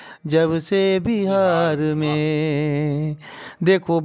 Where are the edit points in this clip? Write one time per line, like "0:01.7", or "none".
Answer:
none